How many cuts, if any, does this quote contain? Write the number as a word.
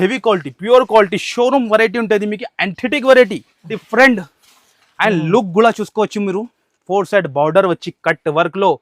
one